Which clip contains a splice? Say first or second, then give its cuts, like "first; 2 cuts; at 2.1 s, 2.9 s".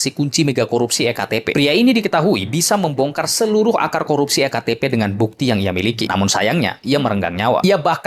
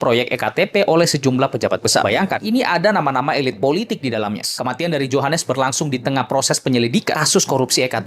second; 1 cut; at 4.5 s